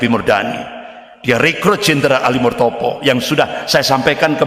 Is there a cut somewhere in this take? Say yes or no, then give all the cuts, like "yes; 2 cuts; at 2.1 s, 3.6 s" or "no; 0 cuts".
no; 0 cuts